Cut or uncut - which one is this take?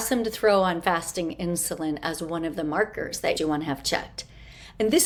uncut